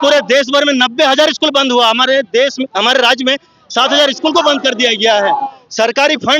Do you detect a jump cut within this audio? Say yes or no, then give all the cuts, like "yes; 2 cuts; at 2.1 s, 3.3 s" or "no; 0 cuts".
no; 0 cuts